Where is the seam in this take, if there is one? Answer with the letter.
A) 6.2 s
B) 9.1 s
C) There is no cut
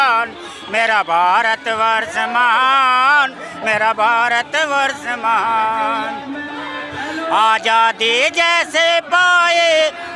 C